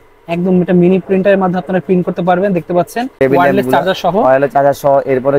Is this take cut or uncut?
cut